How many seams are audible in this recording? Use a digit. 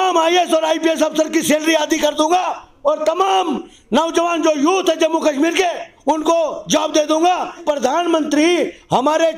1